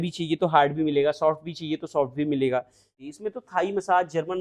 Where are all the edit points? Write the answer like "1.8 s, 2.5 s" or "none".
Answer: 3.0 s